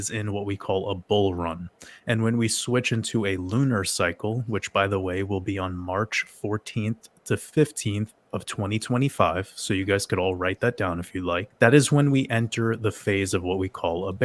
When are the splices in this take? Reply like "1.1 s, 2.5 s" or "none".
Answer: 11.5 s